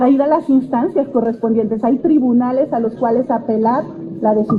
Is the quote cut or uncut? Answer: uncut